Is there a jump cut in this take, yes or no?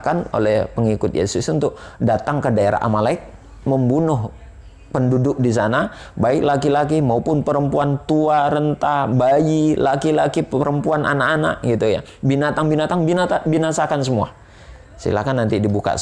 no